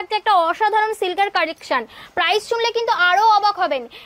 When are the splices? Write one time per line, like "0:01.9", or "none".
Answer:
none